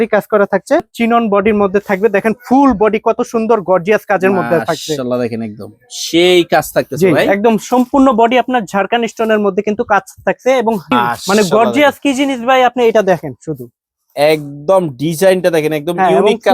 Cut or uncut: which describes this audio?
cut